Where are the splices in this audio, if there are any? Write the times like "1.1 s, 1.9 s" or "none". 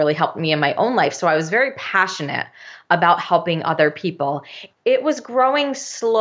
none